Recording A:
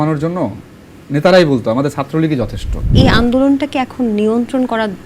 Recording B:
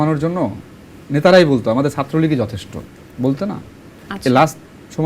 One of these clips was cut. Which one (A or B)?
A